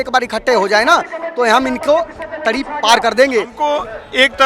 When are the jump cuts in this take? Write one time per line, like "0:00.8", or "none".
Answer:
0:03.5

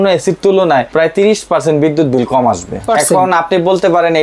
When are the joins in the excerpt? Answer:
0:00.9
0:02.8

